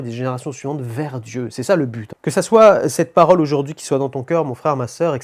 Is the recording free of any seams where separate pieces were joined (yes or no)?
no